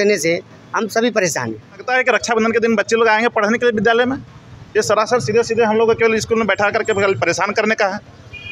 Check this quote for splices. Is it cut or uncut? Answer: cut